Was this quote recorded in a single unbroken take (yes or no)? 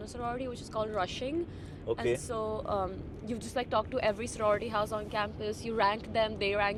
yes